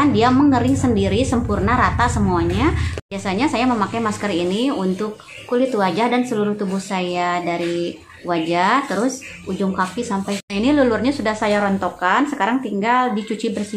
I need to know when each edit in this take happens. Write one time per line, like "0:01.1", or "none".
0:03.0
0:10.4

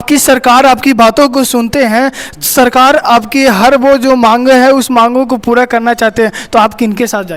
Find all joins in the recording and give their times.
none

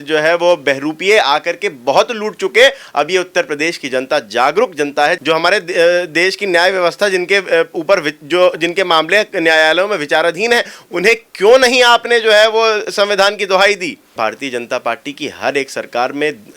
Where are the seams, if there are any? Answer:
0:05.2
0:14.1

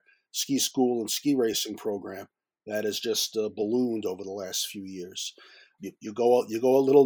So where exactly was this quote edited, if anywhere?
0:05.7

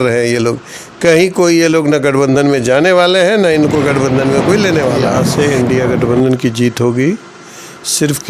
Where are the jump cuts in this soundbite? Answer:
0:05.2

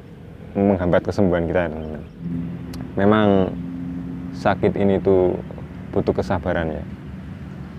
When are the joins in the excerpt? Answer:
0:02.3

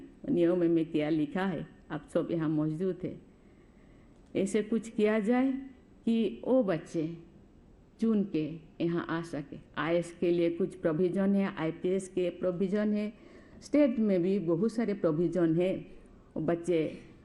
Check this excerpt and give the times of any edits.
none

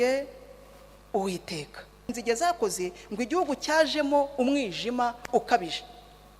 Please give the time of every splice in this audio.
0:02.1

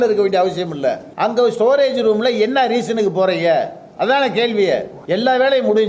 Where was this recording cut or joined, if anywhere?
0:01.1
0:04.9

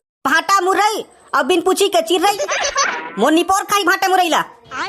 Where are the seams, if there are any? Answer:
0:03.0

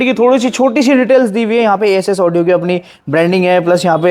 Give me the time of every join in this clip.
none

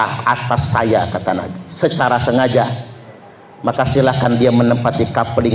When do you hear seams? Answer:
none

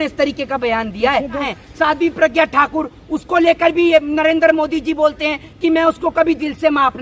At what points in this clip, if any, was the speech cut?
0:01.5

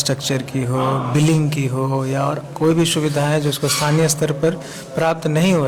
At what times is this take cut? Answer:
none

